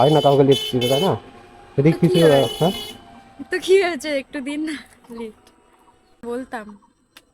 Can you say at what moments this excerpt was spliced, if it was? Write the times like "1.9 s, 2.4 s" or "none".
6.2 s